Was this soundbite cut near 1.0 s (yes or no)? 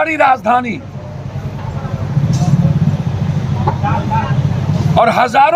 no